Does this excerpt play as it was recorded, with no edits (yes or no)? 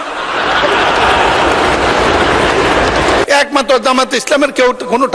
no